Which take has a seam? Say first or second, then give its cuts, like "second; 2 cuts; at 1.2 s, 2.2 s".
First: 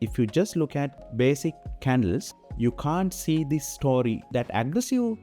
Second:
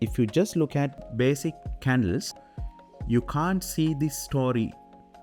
first; 2 cuts; at 2.4 s, 4.3 s